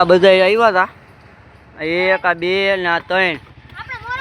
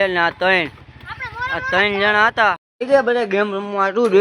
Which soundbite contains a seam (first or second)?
second